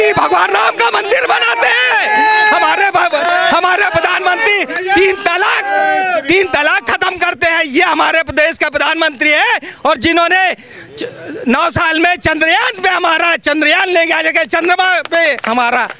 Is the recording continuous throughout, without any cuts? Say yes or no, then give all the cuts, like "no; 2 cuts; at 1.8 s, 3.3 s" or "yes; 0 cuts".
yes; 0 cuts